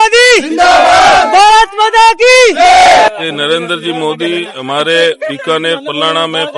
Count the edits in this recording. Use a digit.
1